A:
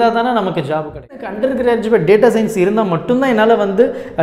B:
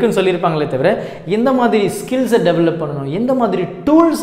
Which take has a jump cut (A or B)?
A